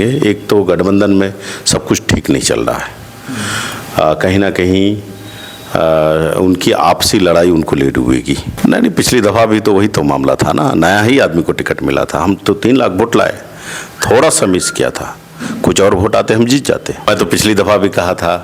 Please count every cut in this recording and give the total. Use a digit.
2